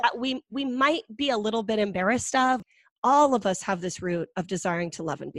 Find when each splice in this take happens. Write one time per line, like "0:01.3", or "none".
0:02.6